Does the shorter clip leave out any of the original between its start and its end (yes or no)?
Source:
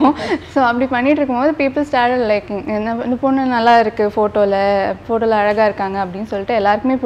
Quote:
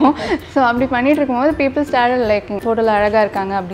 yes